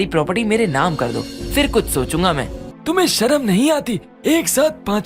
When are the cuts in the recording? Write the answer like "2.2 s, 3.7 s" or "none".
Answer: 2.7 s

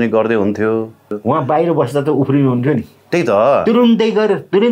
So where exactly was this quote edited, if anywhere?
1.2 s

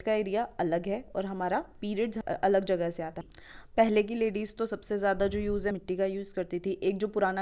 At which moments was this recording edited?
2.2 s, 3.2 s, 5.7 s

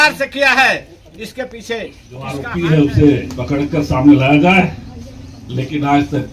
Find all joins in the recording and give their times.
2.5 s

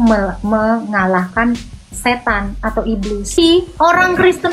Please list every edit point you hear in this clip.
3.4 s

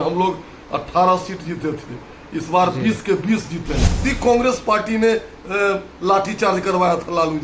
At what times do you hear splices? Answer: 3.9 s

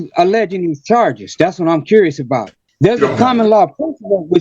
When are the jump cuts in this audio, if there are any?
2.6 s

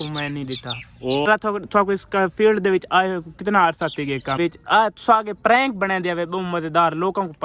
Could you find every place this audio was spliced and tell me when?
1.3 s, 4.4 s

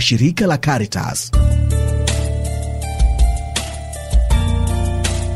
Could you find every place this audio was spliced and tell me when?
1.2 s

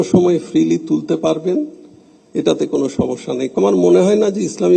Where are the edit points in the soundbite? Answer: 3.6 s

